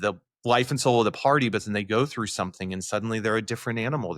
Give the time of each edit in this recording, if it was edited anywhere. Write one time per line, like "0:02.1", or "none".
none